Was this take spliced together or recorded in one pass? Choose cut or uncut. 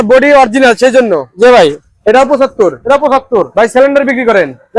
cut